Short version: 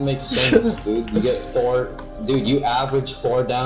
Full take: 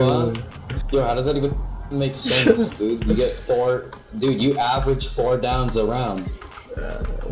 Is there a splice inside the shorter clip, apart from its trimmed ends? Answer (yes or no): no